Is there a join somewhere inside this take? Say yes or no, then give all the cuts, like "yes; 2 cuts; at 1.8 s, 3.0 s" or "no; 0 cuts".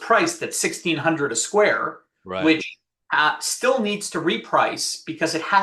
no; 0 cuts